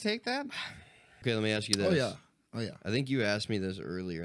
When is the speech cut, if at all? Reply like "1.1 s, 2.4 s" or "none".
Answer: 1.1 s

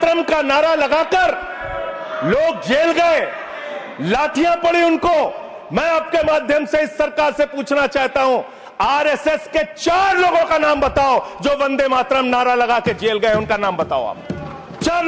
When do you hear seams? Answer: none

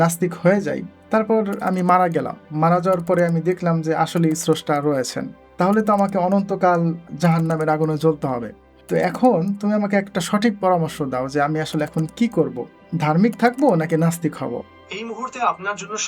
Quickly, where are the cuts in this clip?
14.8 s

